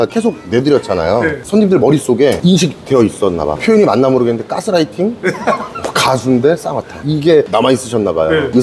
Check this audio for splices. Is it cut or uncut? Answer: uncut